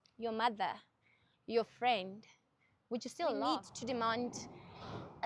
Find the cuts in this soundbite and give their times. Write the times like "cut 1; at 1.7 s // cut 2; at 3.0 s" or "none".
cut 1; at 3.5 s